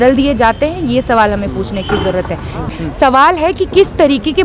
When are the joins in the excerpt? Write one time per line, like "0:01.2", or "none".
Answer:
0:02.6